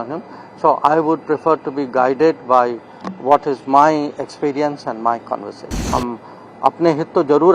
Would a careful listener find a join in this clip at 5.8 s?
yes; 1 cut; at 5.8 s

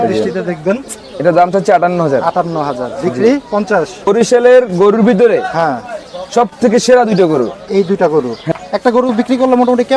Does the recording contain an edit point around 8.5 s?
yes; 3 cuts; at 1.0 s, 4.1 s, 8.5 s

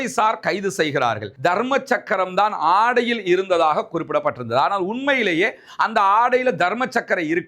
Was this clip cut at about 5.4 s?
no; 1 cut; at 1.2 s

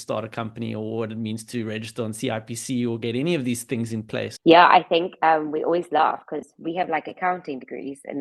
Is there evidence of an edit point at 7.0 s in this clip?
no; 1 cut; at 4.3 s

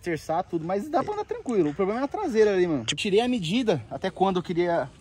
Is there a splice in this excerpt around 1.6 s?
no; 1 cut; at 2.9 s

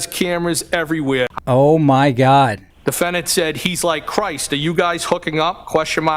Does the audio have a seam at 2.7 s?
yes; 2 cuts; at 1.4 s, 2.7 s

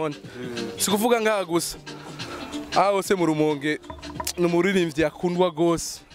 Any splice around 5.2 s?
no; 0 cuts

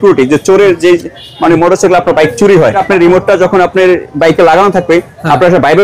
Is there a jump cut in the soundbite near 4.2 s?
no; 1 cut; at 2.8 s

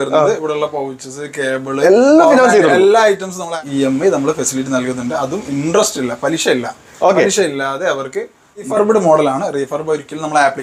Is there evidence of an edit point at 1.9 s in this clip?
no; 2 cuts; at 3.5 s, 8.7 s

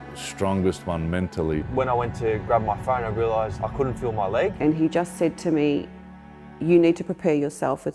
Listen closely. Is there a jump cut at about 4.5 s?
yes; 3 cuts; at 1.7 s, 3.5 s, 4.5 s

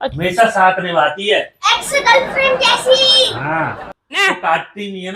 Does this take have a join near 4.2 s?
yes; 1 cut; at 4.2 s

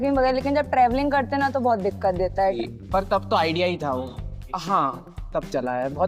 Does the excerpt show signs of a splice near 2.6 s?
yes; 1 cut; at 2.6 s

